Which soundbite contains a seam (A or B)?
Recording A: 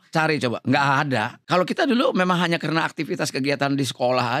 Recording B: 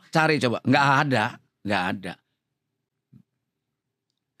A